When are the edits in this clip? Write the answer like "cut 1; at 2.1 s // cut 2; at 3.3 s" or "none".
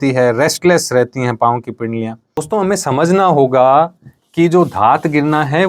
cut 1; at 2.4 s